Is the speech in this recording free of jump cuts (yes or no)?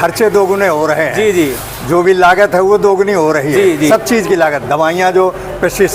yes